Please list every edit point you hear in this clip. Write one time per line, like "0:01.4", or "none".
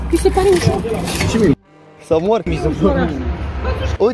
none